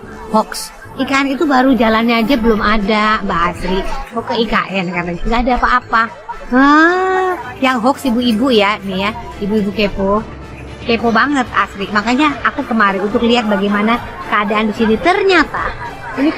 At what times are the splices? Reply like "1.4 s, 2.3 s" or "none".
none